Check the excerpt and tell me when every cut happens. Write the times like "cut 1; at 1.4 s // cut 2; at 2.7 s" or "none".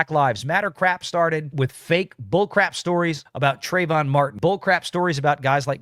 cut 1; at 1.5 s // cut 2; at 3.3 s // cut 3; at 4.3 s